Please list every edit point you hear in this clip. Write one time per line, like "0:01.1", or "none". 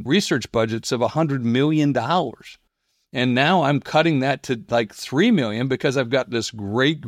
none